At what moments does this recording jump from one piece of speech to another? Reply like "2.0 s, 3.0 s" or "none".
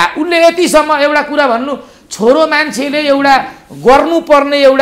none